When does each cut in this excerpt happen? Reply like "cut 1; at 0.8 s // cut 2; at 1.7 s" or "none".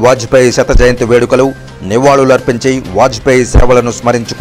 none